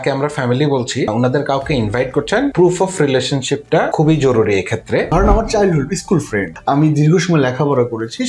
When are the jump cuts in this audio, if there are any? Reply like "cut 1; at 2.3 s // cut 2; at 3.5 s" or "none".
cut 1; at 1.1 s // cut 2; at 2.5 s // cut 3; at 3.9 s // cut 4; at 5.1 s // cut 5; at 6.5 s